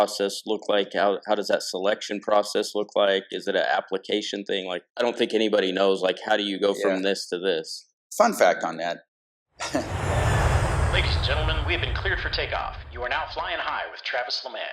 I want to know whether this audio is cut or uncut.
cut